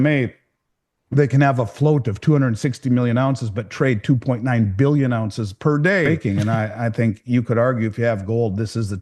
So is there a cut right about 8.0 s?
no; 1 cut; at 6.1 s

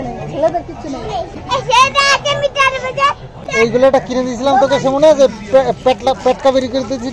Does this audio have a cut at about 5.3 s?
no; 2 cuts; at 1.3 s, 3.7 s

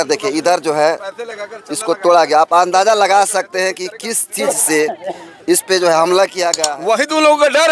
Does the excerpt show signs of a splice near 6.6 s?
yes; 1 cut; at 6.6 s

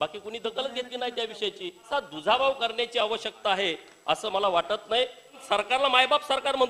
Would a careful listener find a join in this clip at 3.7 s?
no; 2 cuts; at 1.9 s, 5.4 s

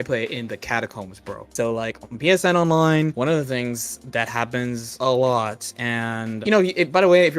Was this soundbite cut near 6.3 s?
yes; 3 cuts; at 3.1 s, 4.9 s, 6.3 s

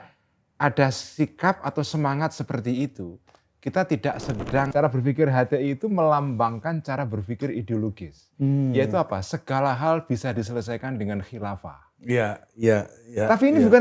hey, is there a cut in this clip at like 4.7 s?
yes; 1 cut; at 4.7 s

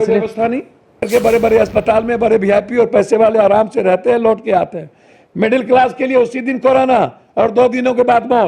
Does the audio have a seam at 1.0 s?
yes; 1 cut; at 1.0 s

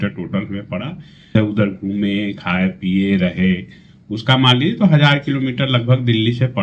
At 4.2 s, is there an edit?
no; 1 cut; at 1.3 s

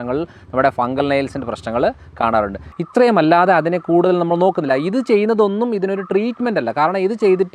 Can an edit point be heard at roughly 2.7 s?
yes; 1 cut; at 2.7 s

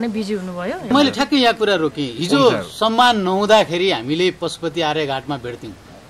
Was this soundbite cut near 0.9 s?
yes; 1 cut; at 0.9 s

